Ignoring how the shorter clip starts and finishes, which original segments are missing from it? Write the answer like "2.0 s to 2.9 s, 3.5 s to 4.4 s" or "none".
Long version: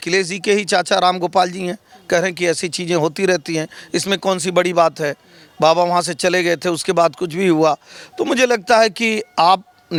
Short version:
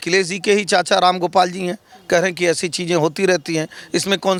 none